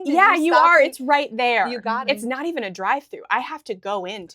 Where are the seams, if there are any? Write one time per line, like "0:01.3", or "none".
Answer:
0:01.8